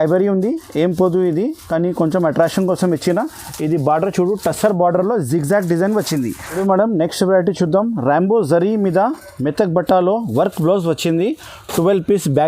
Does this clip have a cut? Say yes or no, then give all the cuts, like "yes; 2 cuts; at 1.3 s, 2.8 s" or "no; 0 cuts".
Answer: yes; 1 cut; at 6.4 s